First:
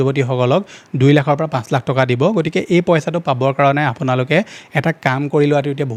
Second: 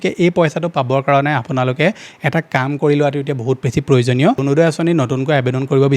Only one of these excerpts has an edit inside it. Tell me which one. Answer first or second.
second